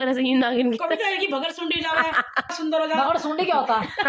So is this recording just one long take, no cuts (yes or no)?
no